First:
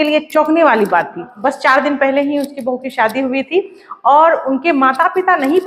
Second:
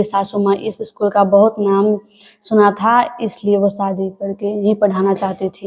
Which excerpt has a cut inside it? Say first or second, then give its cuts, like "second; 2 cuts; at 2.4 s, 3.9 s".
first; 1 cut; at 1.3 s